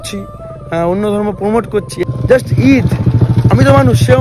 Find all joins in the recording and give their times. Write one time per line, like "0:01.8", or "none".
0:02.0